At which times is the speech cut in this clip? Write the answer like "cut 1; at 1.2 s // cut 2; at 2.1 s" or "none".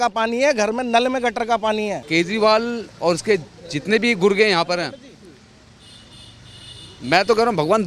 cut 1; at 2.0 s